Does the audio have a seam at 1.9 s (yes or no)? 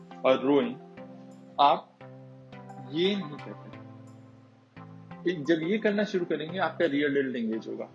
no